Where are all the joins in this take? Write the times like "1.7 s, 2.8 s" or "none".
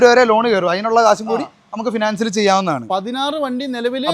none